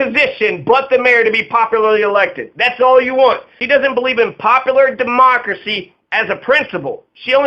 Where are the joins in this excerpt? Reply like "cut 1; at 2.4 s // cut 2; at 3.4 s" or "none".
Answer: cut 1; at 3.5 s